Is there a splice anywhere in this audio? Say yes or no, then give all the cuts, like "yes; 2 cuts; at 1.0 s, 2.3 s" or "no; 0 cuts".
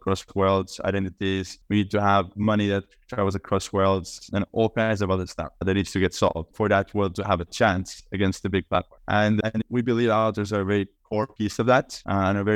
no; 0 cuts